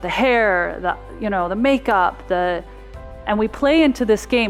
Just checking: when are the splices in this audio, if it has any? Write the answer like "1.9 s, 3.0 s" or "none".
none